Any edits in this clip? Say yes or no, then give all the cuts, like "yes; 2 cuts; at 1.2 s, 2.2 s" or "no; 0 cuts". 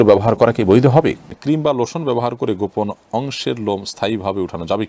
yes; 1 cut; at 1.3 s